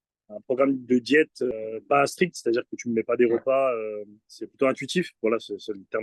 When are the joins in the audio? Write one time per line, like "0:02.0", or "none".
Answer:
0:01.5